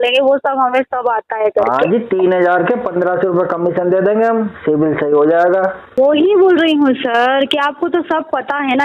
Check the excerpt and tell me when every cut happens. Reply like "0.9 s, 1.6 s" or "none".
5.8 s